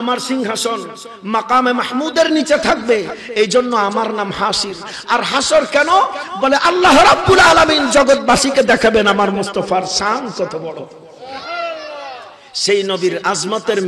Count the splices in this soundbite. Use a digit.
0